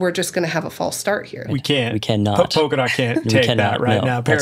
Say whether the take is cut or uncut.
cut